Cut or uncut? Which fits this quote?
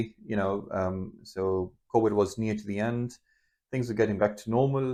uncut